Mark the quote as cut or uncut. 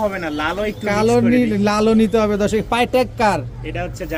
uncut